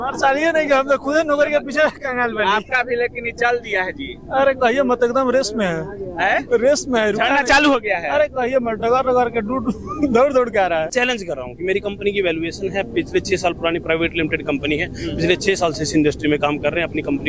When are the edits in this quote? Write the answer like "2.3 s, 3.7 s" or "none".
10.9 s